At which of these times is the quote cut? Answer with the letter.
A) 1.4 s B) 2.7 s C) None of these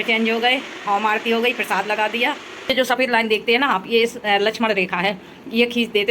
B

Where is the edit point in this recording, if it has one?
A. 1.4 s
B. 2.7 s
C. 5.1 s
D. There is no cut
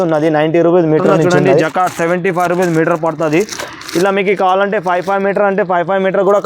A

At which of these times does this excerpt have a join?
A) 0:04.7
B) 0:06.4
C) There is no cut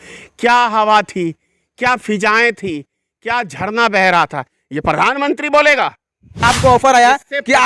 B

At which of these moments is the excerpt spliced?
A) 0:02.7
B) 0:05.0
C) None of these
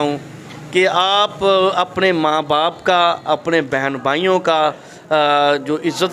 C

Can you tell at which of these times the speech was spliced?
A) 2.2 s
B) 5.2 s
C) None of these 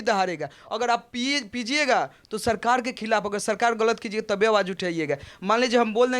C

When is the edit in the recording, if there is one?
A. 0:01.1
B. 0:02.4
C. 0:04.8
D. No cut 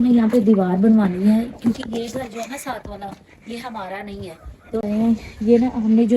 C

